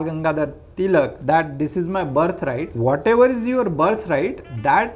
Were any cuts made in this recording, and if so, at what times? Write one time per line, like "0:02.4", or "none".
0:01.2
0:02.7